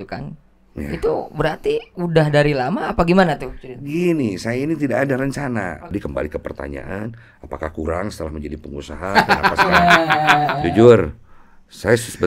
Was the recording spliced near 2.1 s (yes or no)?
no